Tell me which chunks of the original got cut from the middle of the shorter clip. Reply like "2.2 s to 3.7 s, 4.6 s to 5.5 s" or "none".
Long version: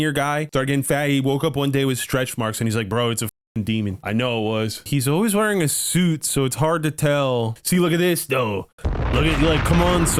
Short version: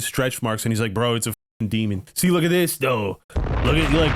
4.0 s to 7.6 s